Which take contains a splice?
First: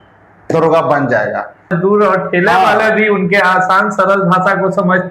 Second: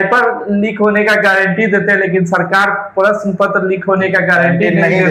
first; 1 cut; at 1.7 s

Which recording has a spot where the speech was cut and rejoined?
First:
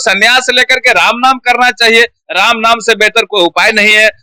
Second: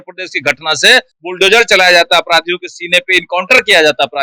second; 1 cut; at 1.2 s

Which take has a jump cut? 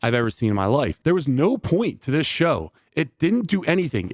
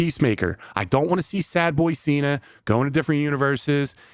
first; 1 cut; at 1.0 s

